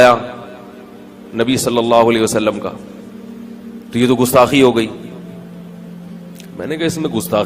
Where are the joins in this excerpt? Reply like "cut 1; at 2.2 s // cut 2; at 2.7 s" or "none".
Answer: none